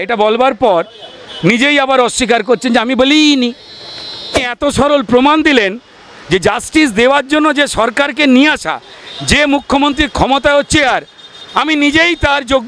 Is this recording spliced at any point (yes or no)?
yes